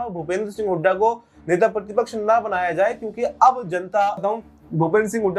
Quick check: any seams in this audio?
yes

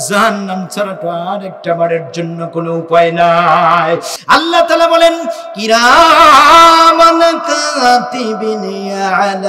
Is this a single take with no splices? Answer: no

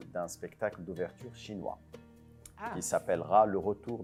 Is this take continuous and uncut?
yes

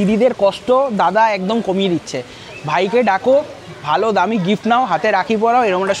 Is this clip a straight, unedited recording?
yes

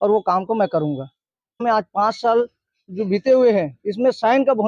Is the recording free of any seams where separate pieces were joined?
no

